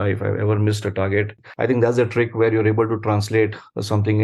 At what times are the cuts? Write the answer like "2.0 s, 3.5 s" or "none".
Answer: 1.4 s